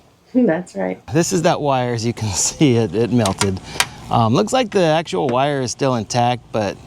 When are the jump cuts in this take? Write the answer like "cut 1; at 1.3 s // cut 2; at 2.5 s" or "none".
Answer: cut 1; at 1.0 s